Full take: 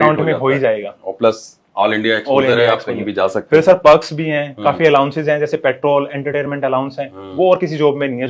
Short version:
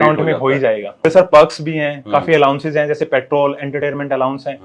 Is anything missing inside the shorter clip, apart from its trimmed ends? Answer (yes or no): yes